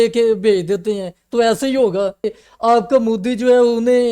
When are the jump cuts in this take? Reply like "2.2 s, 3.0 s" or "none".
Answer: 2.4 s